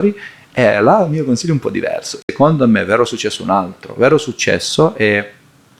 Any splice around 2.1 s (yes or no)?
yes